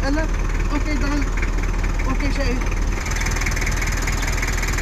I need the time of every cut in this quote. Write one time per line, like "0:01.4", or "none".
0:03.0

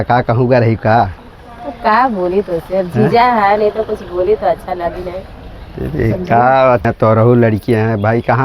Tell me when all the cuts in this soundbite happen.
0:06.9

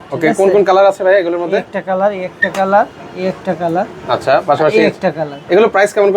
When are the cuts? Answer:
none

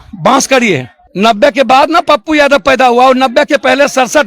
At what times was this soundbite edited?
0:01.0

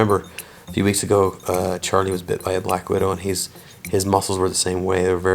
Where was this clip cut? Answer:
none

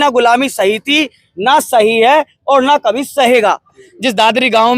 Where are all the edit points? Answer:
0:03.8

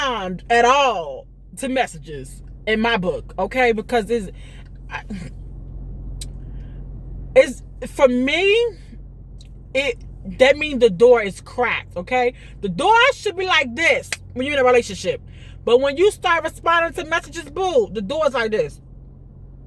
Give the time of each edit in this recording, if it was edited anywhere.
none

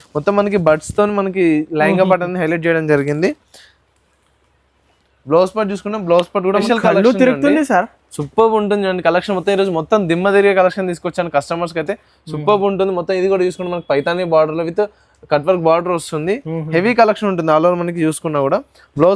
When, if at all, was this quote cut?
0:06.6

